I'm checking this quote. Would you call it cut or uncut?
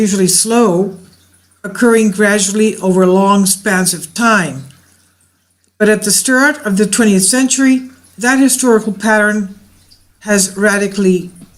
uncut